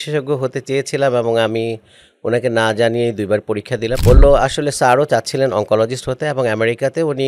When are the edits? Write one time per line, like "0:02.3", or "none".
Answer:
0:04.0